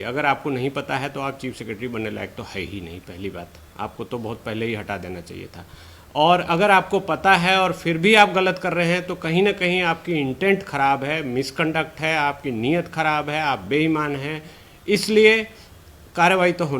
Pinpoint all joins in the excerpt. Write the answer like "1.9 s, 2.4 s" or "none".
none